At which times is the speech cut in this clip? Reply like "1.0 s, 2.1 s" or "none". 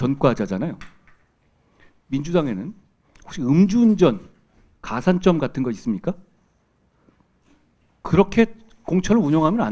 none